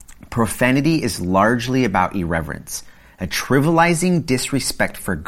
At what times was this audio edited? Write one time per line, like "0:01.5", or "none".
none